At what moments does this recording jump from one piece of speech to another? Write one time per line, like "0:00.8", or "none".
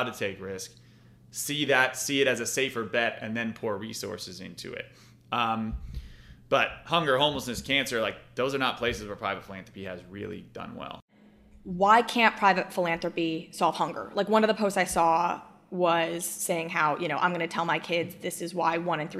0:11.1